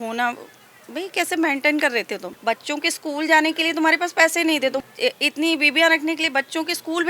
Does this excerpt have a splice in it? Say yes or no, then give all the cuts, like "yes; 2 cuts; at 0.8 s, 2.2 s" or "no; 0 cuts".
yes; 2 cuts; at 2.3 s, 4.8 s